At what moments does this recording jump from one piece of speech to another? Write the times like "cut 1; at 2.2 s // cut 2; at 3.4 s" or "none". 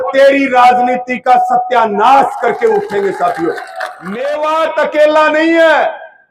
cut 1; at 4.1 s

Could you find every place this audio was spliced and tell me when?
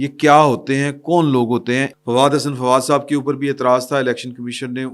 cut 1; at 2.0 s

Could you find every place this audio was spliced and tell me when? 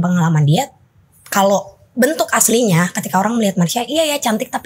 none

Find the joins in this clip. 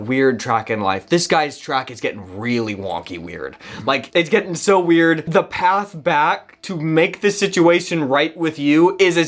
cut 1; at 4.0 s // cut 2; at 5.2 s

